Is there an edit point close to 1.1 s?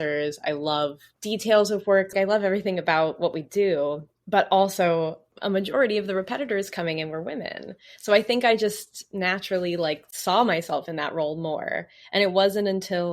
yes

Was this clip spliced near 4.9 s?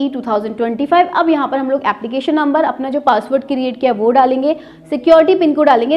no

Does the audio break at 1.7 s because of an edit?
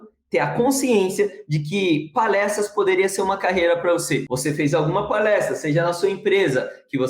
no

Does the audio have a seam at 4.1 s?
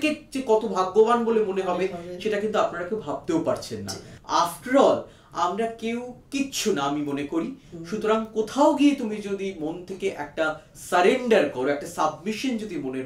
yes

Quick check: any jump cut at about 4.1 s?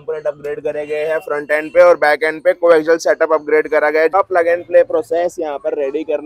yes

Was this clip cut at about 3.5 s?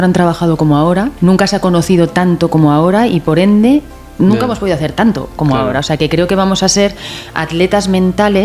no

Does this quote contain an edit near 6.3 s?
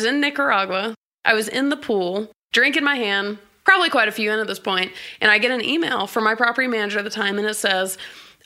no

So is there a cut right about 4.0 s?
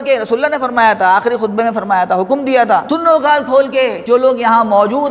yes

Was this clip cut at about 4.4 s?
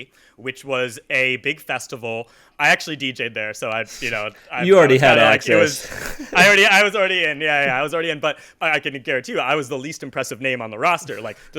no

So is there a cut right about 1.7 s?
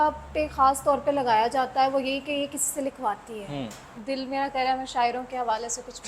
no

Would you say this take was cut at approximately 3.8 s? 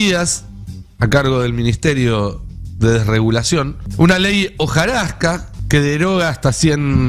yes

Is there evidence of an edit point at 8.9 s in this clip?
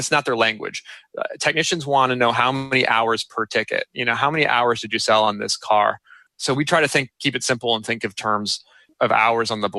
yes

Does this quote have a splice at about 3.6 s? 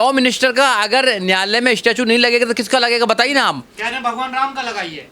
no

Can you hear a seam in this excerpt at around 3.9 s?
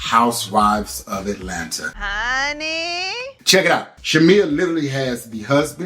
yes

